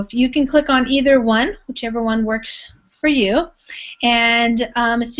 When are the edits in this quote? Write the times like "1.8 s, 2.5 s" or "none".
2.1 s